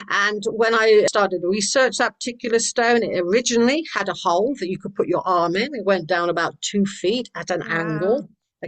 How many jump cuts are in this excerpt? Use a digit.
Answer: 1